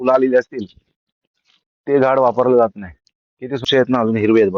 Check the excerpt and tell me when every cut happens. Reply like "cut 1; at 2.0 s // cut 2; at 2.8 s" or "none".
cut 1; at 3.6 s